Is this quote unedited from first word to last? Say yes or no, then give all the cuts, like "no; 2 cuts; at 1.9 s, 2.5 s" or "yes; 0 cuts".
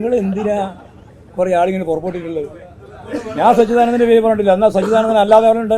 yes; 0 cuts